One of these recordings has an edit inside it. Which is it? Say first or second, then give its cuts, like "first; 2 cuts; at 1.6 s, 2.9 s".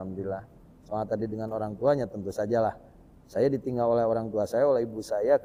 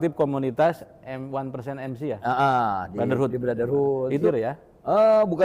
second; 1 cut; at 4.2 s